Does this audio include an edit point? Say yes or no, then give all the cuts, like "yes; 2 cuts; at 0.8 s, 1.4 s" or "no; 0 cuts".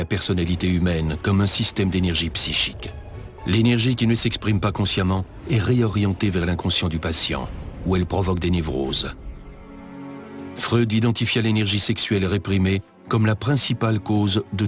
no; 0 cuts